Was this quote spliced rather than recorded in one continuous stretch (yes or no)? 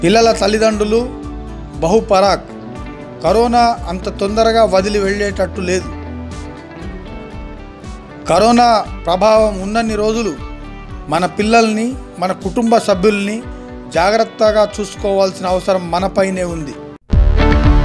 no